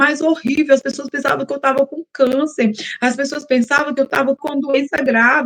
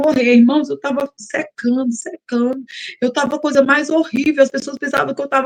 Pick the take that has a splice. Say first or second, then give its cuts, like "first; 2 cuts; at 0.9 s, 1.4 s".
first; 1 cut; at 4.4 s